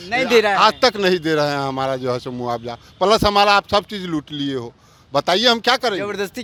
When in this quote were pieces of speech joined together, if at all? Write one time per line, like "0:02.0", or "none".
none